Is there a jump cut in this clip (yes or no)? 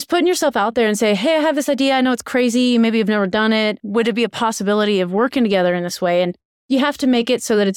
no